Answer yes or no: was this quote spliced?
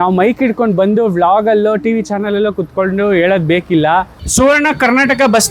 yes